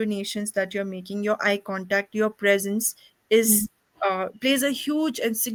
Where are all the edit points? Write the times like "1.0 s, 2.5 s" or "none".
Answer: none